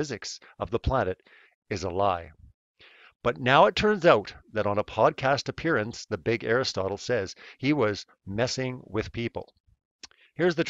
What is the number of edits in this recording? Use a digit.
0